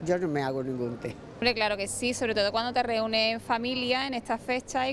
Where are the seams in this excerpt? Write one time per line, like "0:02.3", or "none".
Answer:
0:01.5